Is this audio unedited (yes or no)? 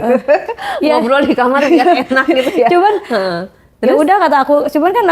yes